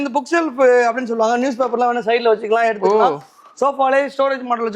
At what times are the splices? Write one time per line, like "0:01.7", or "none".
none